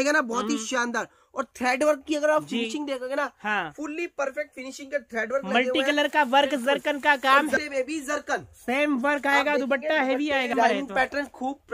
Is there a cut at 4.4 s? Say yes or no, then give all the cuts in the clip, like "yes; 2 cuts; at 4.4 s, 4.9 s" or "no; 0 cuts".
no; 2 cuts; at 7.6 s, 10.5 s